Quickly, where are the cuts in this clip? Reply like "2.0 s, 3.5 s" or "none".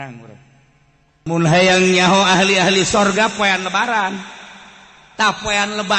1.3 s